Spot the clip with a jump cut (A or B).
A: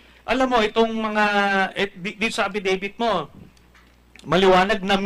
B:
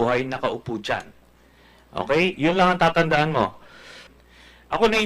B